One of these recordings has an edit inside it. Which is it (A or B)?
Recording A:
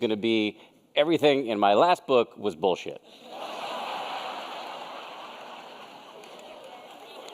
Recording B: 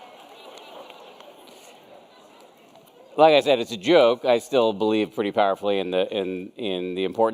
A